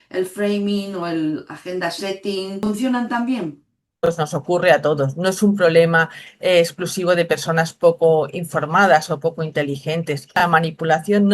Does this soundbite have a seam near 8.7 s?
no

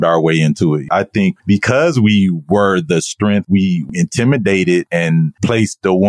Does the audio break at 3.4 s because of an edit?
yes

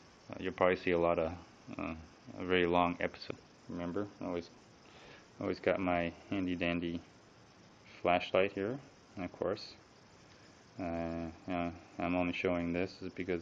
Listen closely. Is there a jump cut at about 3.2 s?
no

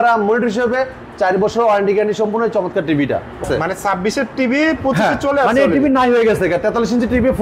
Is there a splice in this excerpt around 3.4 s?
yes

